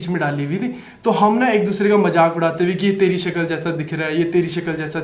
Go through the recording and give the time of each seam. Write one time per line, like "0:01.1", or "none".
none